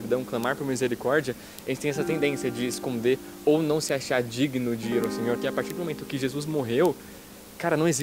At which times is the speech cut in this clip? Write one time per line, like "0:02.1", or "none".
0:05.4

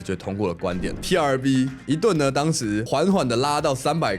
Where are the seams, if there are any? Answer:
0:01.0
0:02.8

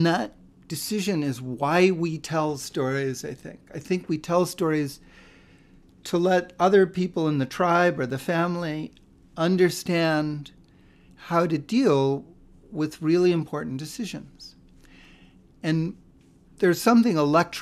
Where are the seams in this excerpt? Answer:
none

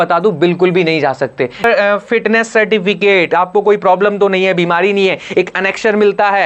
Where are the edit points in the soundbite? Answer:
0:01.6

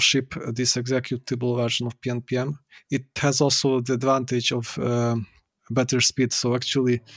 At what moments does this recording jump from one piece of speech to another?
0:03.1

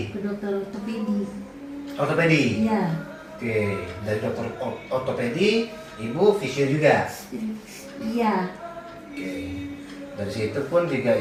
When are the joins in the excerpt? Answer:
none

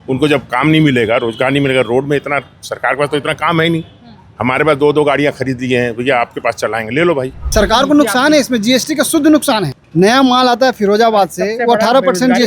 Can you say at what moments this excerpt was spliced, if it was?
0:07.5
0:09.8

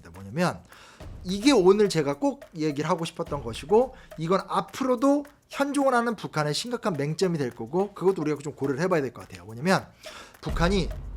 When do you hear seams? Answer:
none

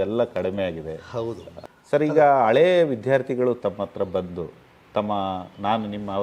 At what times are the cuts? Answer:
0:01.5

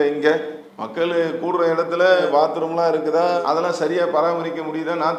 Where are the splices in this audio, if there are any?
none

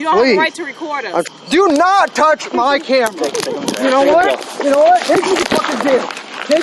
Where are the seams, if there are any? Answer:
0:01.2

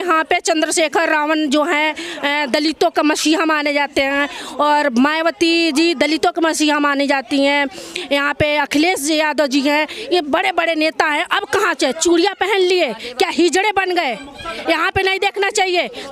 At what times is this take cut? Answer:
none

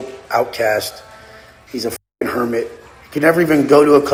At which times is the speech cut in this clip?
none

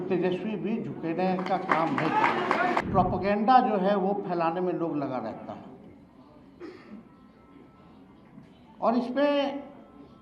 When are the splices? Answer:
0:02.8

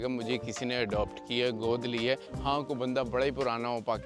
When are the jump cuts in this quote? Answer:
0:02.3

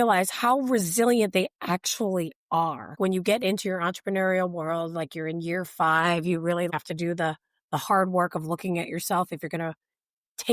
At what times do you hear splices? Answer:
0:02.9
0:06.7

